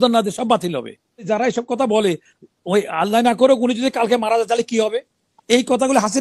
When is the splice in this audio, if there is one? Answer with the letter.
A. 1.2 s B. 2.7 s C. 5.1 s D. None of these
A